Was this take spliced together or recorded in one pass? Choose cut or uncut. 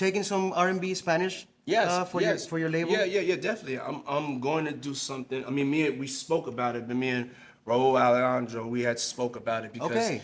uncut